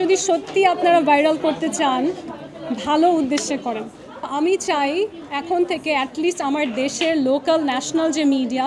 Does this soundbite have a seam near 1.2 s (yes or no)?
no